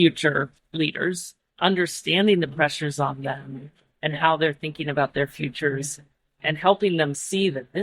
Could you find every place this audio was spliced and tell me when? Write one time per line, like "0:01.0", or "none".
0:01.0